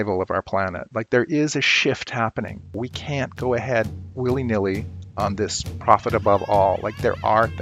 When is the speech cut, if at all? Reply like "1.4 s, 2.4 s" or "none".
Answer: 2.8 s, 4.0 s